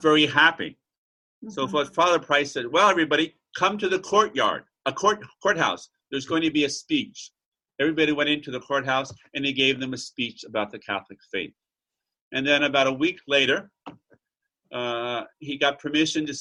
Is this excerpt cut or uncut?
uncut